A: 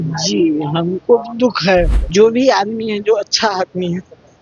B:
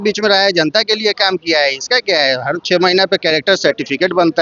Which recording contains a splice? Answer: A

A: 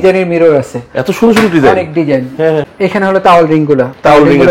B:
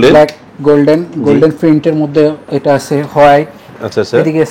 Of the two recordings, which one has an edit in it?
A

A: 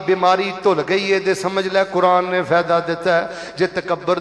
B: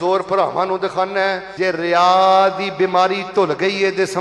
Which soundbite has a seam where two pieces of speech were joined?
B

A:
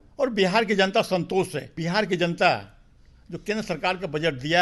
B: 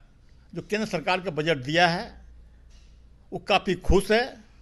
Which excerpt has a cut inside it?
A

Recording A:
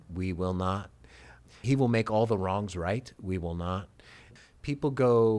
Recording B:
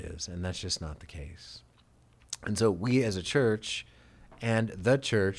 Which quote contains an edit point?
A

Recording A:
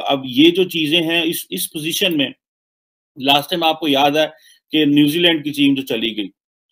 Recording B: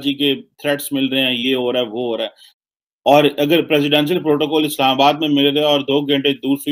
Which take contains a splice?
B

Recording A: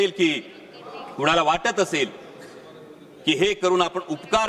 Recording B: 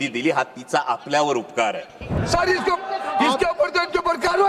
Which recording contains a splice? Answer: B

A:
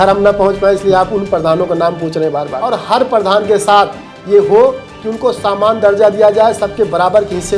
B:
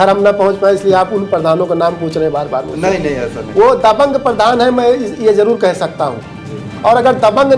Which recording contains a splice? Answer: A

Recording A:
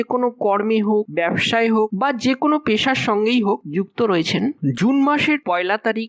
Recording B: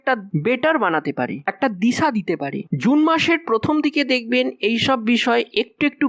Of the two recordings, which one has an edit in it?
B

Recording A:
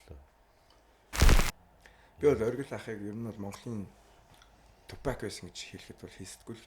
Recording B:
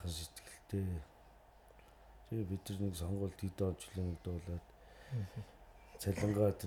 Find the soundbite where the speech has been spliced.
A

